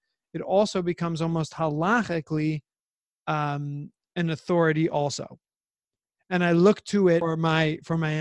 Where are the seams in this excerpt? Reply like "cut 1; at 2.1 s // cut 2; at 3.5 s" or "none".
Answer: cut 1; at 7.2 s